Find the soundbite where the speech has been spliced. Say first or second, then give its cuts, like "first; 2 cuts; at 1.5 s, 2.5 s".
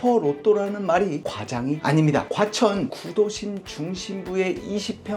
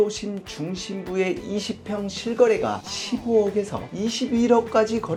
first; 1 cut; at 2.3 s